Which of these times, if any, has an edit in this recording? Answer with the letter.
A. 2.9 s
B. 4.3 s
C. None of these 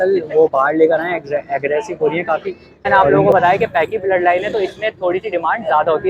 A